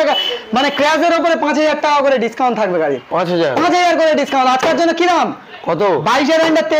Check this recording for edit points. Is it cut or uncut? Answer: uncut